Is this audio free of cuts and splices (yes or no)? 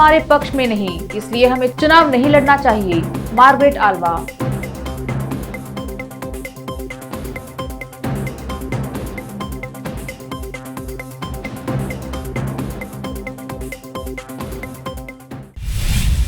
no